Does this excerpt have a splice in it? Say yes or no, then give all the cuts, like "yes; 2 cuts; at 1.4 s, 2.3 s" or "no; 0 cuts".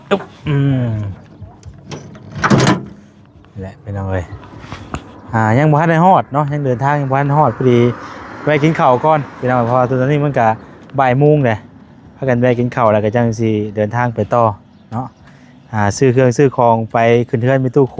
no; 0 cuts